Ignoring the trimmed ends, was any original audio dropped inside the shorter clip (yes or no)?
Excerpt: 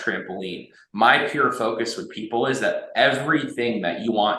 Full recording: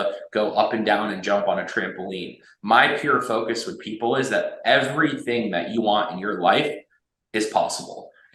no